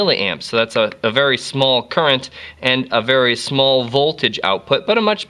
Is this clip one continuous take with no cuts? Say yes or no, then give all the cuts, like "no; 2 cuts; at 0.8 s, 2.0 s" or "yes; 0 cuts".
yes; 0 cuts